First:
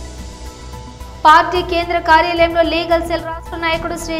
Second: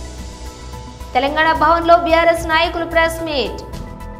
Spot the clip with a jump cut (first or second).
first